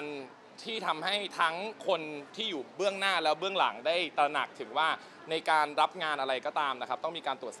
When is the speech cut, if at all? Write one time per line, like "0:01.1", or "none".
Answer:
none